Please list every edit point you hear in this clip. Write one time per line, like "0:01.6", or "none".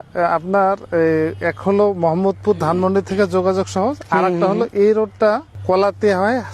0:05.5